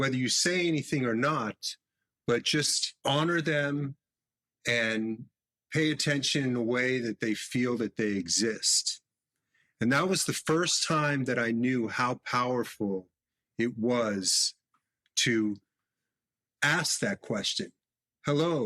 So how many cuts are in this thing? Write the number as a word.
one